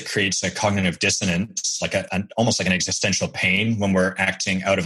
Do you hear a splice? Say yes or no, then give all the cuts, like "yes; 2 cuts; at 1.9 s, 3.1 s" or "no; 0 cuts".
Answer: yes; 1 cut; at 2.1 s